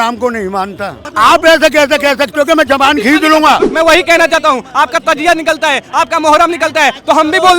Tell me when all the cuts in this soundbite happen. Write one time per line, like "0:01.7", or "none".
0:01.0
0:03.7